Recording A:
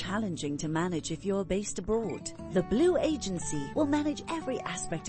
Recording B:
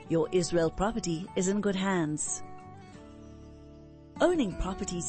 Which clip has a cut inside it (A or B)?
B